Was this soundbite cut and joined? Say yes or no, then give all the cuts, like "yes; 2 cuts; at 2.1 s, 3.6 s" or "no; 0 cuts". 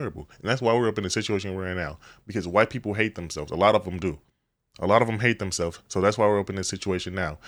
no; 0 cuts